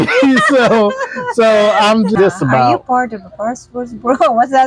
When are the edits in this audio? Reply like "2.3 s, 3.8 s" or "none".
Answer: 2.1 s